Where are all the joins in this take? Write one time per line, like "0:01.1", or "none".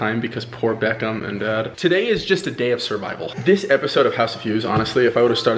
0:01.7